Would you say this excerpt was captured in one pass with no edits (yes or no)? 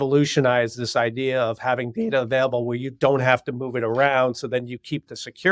yes